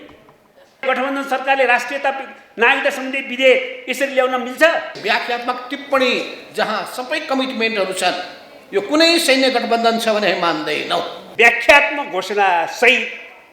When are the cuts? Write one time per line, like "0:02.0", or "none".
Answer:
0:00.8
0:04.9
0:11.2

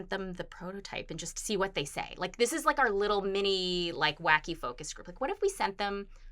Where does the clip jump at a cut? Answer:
none

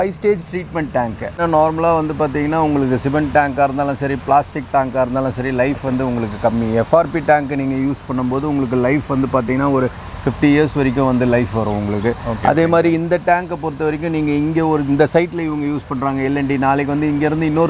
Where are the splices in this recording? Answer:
none

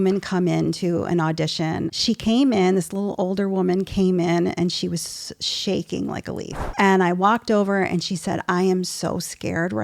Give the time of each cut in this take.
0:01.9
0:06.6

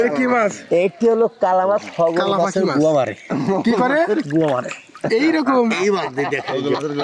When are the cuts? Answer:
none

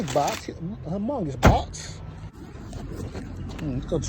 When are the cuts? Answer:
0:02.3

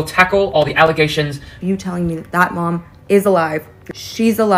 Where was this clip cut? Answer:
0:01.6

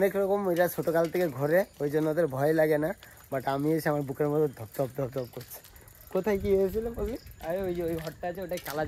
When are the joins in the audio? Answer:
none

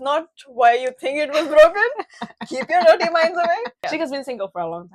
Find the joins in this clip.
0:03.7

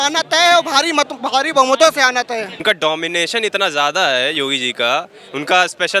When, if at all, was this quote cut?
0:02.6

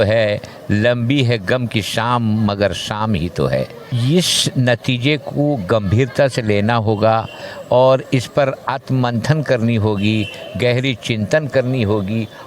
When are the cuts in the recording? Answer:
0:03.8

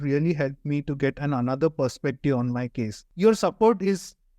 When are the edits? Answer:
0:03.1

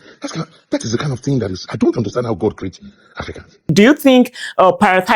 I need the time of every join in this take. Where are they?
0:03.7

